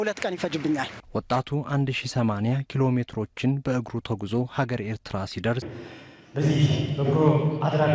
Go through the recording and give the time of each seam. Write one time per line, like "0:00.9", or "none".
0:05.7